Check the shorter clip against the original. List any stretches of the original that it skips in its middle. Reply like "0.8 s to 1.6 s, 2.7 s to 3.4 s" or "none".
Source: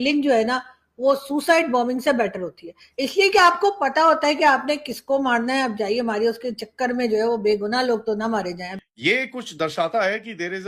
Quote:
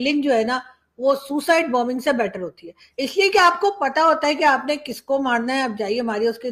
none